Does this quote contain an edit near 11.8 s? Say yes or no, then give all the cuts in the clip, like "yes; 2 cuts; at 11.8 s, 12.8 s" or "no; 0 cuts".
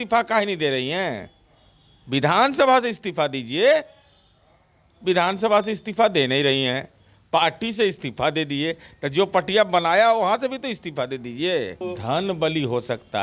yes; 1 cut; at 11.8 s